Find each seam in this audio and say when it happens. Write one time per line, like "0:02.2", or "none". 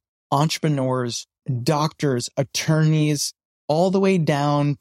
0:01.5